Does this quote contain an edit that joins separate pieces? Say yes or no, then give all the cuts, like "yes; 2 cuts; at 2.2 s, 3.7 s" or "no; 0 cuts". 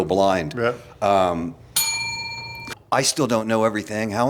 yes; 1 cut; at 2.5 s